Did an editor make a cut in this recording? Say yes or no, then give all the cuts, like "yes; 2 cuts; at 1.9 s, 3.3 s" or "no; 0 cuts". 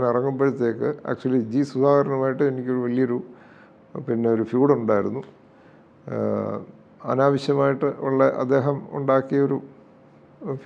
no; 0 cuts